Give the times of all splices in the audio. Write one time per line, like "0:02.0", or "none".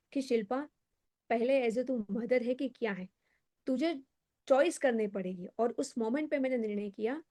none